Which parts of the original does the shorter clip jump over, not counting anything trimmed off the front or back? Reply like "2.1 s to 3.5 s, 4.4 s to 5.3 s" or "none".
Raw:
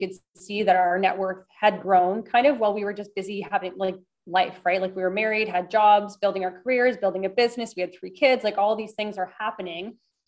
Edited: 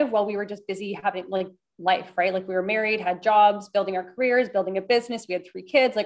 none